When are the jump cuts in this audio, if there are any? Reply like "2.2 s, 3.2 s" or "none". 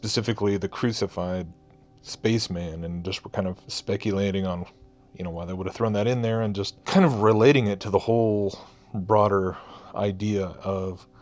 6.8 s